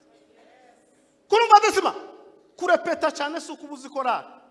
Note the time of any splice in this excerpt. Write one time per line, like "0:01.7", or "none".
none